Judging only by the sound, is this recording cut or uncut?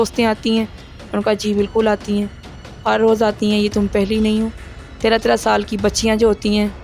uncut